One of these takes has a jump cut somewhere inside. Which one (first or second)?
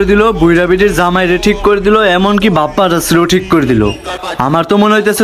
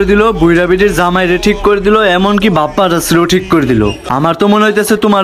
second